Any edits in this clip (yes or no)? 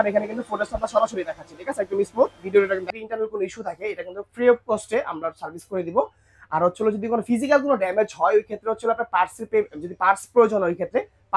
yes